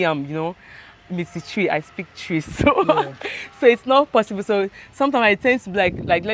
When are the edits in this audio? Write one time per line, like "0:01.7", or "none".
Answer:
none